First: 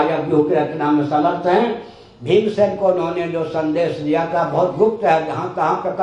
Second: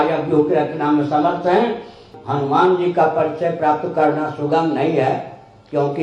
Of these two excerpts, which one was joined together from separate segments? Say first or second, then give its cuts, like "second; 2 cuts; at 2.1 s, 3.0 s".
second; 1 cut; at 2.1 s